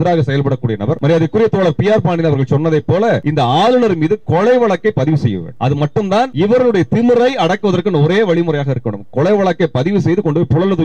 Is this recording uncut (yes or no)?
no